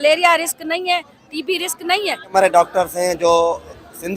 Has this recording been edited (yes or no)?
yes